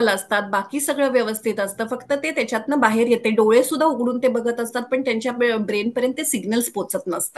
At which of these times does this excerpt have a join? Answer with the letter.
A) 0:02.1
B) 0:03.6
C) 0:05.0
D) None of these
D